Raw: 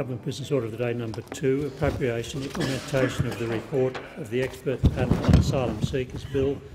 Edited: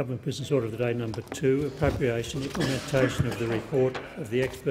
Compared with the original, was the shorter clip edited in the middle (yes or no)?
no